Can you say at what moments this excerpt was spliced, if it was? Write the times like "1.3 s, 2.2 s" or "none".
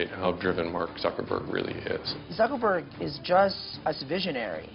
2.1 s, 3.7 s